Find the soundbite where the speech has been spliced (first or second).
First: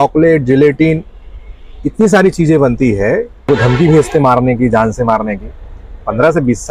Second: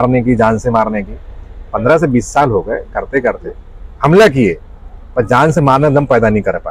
first